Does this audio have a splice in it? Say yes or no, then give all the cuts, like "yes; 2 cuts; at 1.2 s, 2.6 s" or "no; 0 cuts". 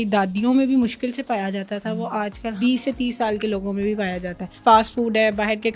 yes; 2 cuts; at 2.5 s, 4.5 s